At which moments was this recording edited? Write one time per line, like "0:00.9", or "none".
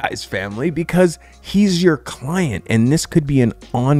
none